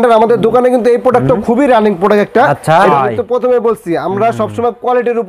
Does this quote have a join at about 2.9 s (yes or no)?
yes